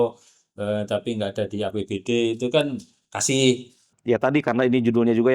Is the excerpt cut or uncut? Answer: cut